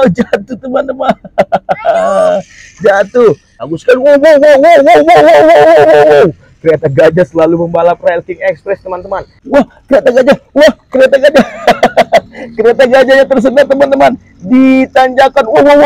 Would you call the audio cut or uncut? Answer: cut